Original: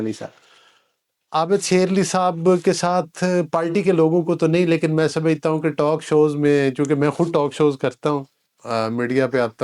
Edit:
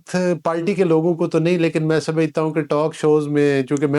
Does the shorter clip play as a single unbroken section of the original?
yes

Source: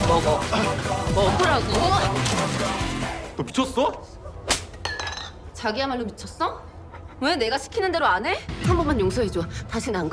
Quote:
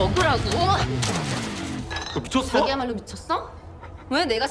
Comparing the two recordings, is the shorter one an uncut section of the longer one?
no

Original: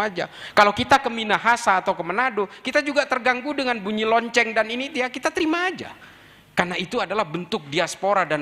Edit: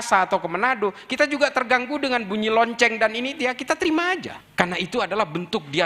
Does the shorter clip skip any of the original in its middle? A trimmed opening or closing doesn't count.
yes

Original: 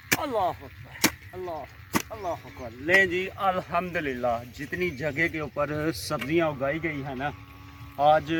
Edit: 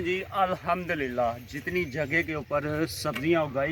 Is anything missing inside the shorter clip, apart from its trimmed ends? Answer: no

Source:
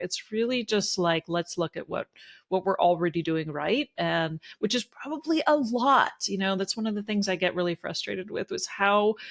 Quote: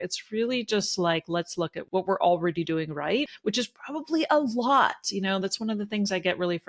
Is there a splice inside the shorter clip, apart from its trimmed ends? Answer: yes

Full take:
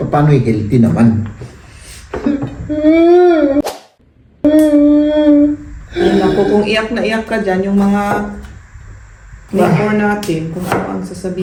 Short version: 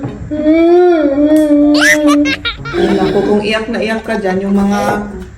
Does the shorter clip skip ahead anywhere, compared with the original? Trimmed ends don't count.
yes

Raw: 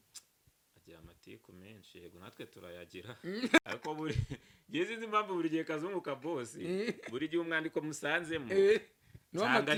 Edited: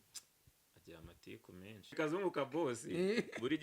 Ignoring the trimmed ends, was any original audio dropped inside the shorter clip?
yes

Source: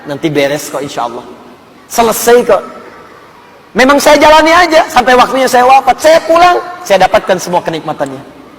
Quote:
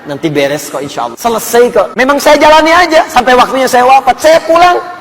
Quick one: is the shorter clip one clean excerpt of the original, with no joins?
no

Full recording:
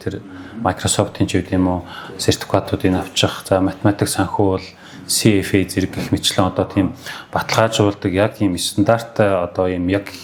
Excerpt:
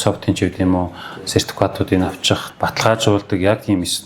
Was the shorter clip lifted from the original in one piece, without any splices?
no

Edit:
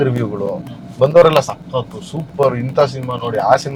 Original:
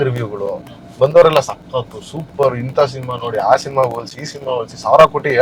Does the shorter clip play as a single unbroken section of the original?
yes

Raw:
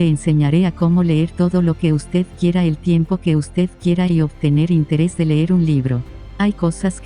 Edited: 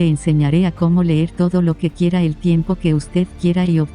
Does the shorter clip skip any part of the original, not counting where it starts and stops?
yes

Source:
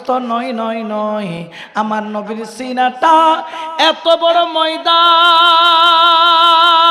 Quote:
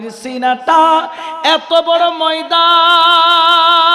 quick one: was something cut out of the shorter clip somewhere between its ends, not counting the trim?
no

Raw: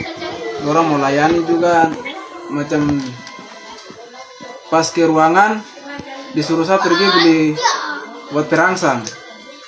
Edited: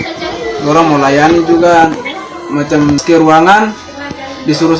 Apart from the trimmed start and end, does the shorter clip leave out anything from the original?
yes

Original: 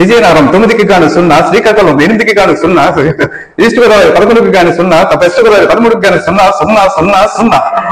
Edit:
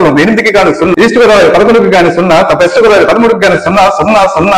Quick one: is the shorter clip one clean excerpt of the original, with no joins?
no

